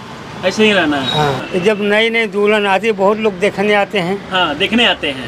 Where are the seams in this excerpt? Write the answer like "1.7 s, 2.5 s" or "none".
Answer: 1.4 s